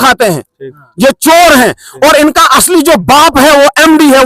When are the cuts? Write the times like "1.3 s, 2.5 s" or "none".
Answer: none